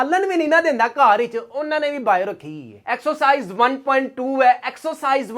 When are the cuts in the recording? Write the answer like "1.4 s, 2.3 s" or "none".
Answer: 2.8 s